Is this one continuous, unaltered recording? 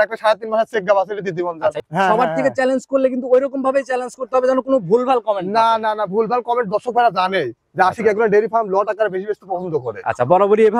no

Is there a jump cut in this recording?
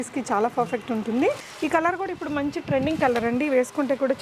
yes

